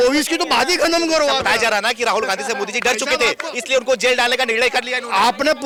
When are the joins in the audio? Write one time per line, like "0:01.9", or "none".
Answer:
none